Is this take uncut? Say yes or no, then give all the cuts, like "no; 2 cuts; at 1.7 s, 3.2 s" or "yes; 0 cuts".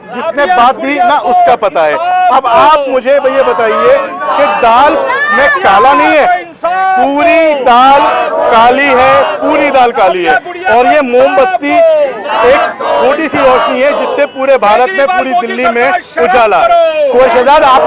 yes; 0 cuts